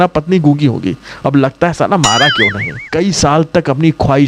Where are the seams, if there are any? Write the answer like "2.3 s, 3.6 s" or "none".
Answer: 2.9 s